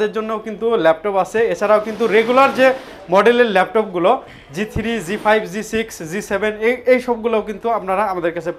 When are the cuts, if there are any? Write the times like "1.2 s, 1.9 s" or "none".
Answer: none